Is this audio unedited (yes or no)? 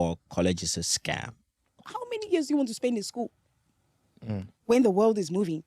no